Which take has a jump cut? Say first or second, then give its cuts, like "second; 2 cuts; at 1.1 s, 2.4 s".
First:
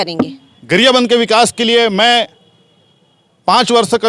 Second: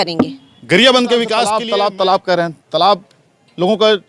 second; 1 cut; at 1.6 s